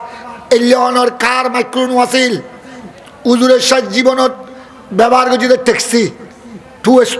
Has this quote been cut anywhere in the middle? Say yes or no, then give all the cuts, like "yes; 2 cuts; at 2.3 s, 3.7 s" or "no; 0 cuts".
no; 0 cuts